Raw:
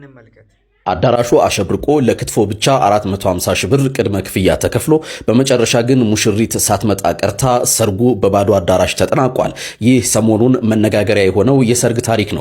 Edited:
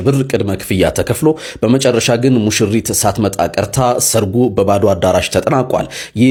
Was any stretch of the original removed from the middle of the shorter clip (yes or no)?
no